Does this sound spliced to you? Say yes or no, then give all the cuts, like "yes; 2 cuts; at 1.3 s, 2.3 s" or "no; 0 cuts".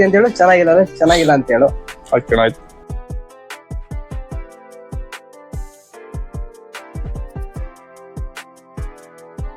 yes; 2 cuts; at 2.6 s, 4.9 s